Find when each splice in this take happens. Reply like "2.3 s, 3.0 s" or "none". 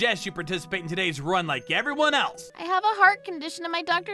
2.4 s